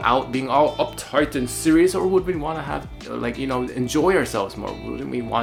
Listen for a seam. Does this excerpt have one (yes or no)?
no